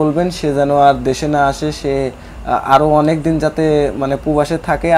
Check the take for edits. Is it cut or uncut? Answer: uncut